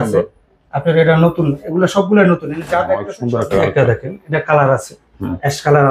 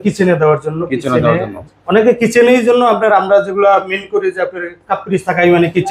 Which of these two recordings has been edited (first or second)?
first